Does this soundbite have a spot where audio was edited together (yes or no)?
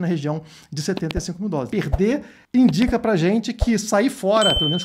yes